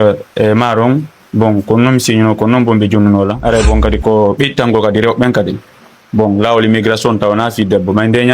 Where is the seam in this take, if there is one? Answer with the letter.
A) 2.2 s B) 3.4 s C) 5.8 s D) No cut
B